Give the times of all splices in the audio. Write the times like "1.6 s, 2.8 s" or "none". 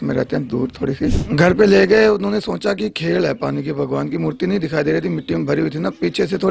1.2 s